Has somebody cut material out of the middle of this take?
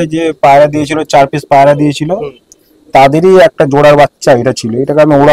no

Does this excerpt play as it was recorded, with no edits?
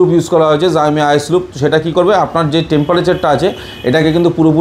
yes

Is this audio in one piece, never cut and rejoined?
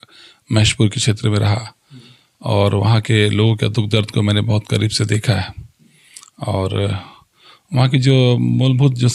yes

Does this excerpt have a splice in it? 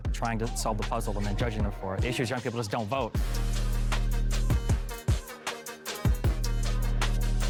no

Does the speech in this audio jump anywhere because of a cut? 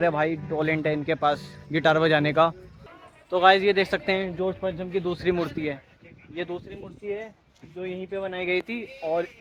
no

